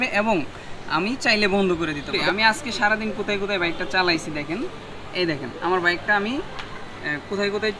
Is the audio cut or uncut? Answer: cut